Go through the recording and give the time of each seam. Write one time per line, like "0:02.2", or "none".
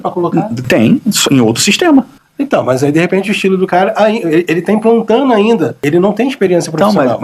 0:05.8